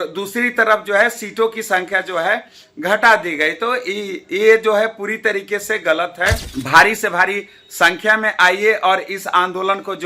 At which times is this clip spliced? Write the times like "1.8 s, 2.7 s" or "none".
6.5 s

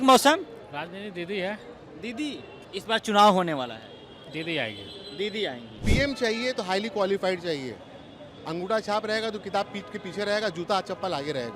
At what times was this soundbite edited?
2.6 s, 5.8 s

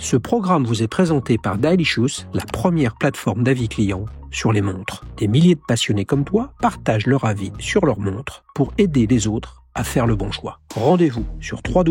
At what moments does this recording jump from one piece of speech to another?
none

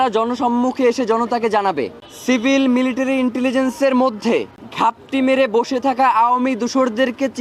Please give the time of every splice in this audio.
2.0 s, 4.6 s

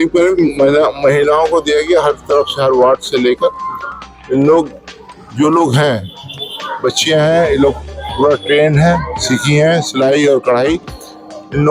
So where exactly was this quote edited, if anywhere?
none

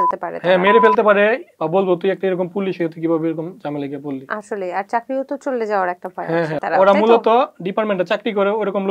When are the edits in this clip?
1.5 s, 6.6 s

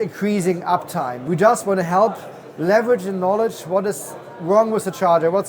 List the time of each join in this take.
1.2 s

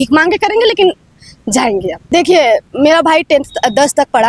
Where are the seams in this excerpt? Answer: 2.0 s

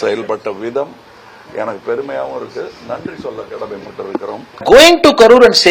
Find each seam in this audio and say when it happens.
4.6 s

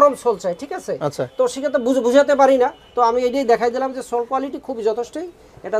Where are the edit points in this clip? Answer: none

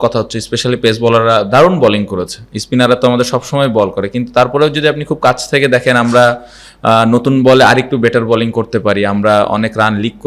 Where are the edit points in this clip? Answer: none

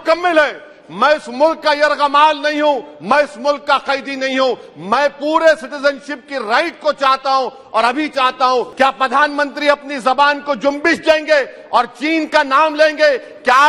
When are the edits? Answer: 8.7 s

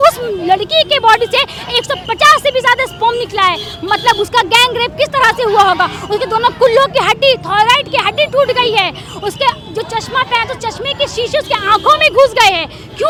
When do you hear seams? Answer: none

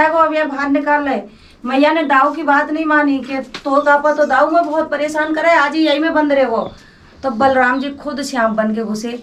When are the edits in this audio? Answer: none

